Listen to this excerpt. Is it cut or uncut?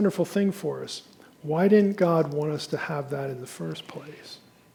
uncut